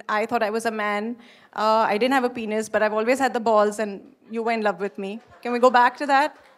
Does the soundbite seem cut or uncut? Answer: uncut